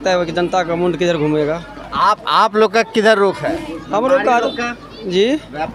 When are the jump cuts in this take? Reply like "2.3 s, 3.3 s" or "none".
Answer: none